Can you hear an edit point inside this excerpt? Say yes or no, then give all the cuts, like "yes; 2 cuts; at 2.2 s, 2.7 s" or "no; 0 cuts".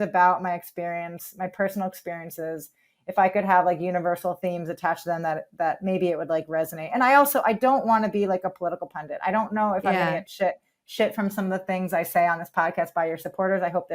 no; 0 cuts